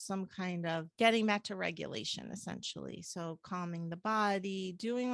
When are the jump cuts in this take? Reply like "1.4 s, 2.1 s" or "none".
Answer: 0.9 s

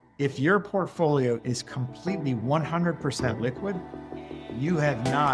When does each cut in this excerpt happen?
none

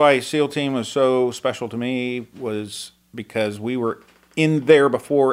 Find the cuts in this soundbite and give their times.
none

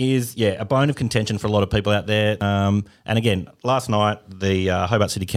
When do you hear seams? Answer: 2.4 s

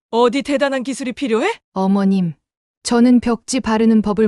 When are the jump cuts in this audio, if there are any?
1.6 s

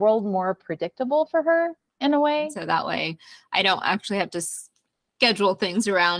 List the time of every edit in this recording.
2.6 s

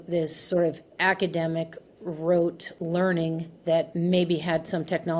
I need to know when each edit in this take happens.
2.7 s, 3.9 s

